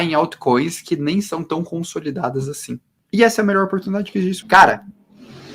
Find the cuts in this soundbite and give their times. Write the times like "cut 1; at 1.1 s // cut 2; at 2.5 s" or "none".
cut 1; at 2.9 s // cut 2; at 4.4 s